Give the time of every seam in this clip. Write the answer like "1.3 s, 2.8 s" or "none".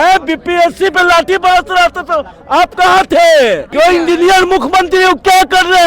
3.7 s